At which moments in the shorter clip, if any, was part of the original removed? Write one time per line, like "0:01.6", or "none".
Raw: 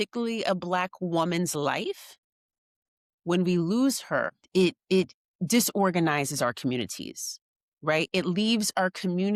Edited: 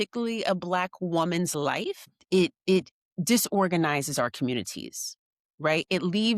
0:02.2